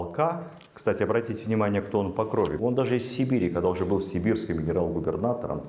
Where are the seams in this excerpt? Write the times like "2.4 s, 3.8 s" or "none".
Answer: 2.6 s